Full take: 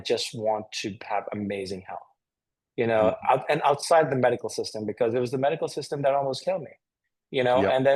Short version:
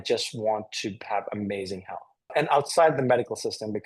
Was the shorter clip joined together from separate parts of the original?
yes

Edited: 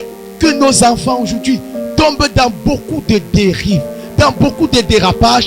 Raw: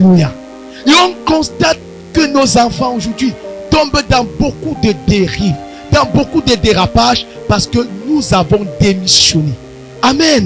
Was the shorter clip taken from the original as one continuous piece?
yes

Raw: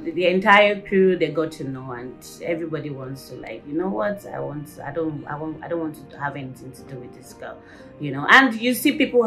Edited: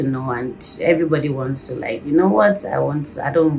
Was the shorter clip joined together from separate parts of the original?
no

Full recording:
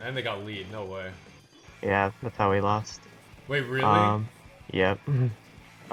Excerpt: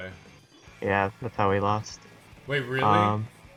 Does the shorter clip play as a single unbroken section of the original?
yes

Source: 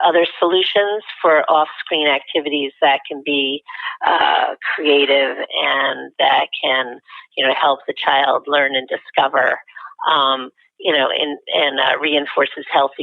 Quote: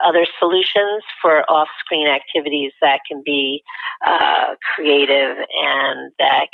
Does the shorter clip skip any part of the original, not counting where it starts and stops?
no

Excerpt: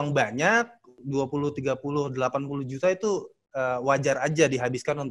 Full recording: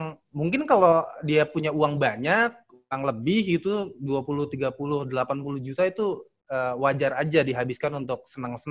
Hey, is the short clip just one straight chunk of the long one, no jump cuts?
no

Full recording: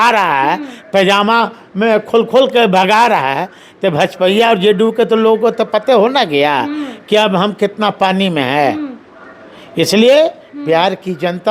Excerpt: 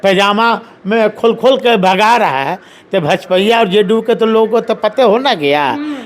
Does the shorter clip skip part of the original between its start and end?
no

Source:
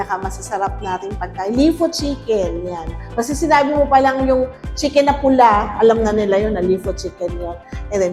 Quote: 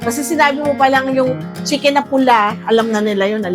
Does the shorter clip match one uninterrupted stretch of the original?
yes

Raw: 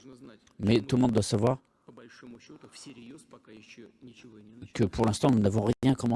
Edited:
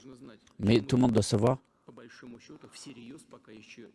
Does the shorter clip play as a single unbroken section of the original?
yes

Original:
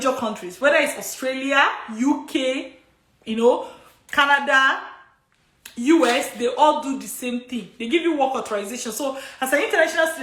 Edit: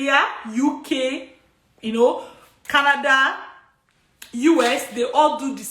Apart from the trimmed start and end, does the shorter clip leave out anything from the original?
no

